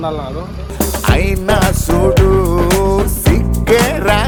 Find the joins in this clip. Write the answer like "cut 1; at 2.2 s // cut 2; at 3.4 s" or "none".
none